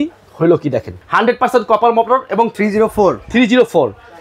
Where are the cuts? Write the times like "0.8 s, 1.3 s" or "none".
0.9 s